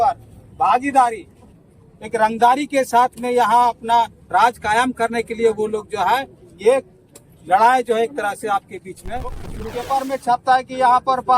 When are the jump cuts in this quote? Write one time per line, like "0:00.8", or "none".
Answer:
0:01.6
0:09.5